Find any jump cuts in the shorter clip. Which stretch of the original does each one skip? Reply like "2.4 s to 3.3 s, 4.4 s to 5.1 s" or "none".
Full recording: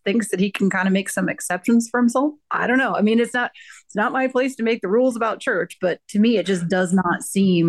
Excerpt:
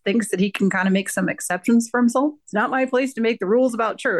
2.4 s to 3.8 s